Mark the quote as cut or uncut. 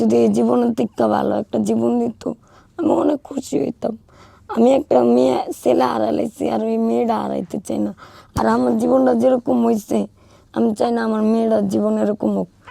uncut